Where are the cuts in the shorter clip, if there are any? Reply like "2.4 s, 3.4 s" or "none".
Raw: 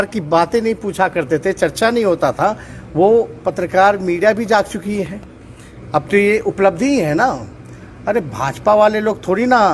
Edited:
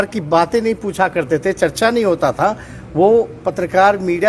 none